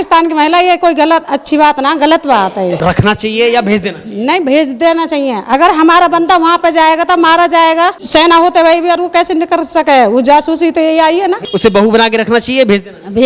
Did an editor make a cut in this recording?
yes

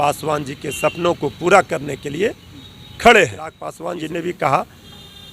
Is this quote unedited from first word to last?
no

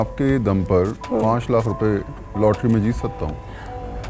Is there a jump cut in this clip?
no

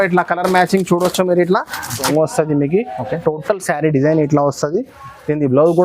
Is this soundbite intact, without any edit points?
no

